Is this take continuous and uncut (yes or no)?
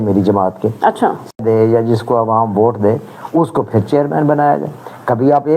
no